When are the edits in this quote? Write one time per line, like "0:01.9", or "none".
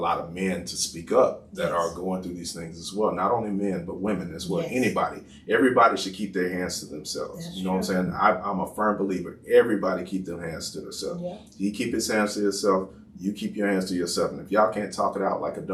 none